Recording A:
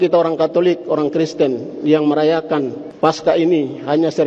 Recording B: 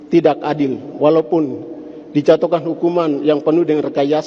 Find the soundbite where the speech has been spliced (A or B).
A